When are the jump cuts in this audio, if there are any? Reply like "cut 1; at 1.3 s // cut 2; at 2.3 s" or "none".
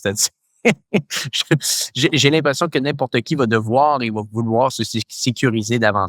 none